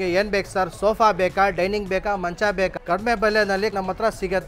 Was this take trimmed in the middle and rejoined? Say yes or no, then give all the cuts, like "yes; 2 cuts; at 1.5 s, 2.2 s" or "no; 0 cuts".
yes; 2 cuts; at 2.8 s, 3.7 s